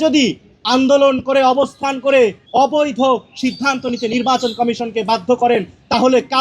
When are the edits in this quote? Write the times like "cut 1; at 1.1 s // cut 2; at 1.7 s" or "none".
cut 1; at 2.4 s